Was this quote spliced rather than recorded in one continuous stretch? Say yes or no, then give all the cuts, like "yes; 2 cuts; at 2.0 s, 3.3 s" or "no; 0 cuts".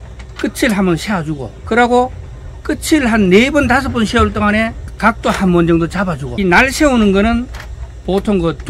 no; 0 cuts